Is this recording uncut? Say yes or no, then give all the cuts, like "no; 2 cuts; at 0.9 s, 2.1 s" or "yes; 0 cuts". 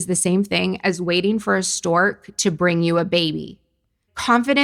yes; 0 cuts